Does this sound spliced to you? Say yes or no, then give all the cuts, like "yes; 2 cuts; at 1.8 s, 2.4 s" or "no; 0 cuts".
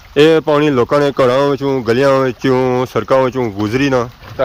no; 0 cuts